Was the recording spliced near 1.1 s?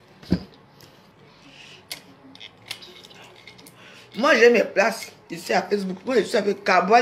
yes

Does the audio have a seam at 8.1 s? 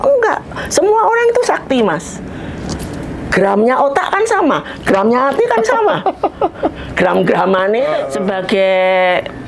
yes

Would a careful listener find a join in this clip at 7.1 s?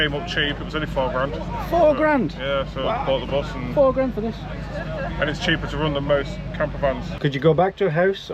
yes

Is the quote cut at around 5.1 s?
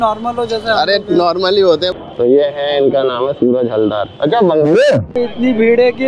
yes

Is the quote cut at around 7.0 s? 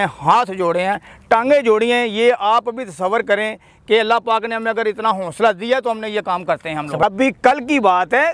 yes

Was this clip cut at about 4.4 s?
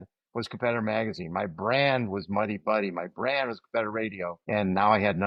yes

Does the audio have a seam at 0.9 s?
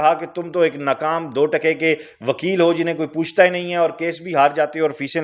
no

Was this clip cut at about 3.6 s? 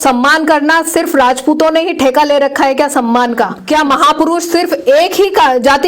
yes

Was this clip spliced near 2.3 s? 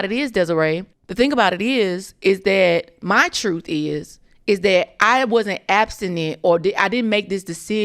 no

